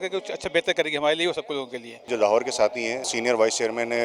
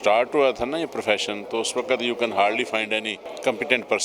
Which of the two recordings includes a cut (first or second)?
first